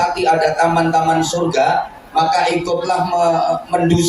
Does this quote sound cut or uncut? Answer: uncut